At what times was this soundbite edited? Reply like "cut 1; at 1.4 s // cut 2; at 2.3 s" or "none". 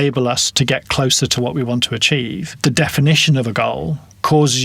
cut 1; at 2.6 s